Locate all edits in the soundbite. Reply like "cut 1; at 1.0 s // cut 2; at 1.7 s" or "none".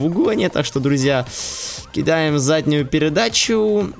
none